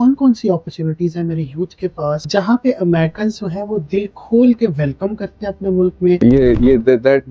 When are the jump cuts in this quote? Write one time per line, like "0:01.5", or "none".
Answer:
0:02.2
0:06.2